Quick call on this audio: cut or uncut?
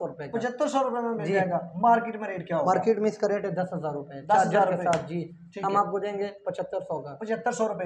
uncut